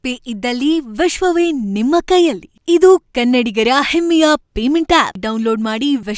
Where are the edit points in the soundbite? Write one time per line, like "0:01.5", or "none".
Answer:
none

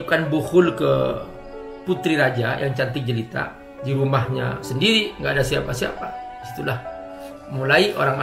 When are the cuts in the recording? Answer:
0:03.7

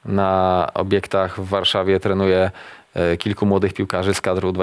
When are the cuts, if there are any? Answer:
none

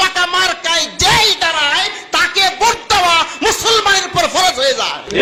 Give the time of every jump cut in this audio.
none

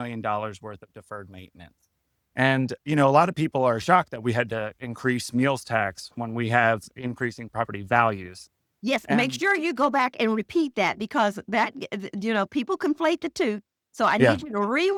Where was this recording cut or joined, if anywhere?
none

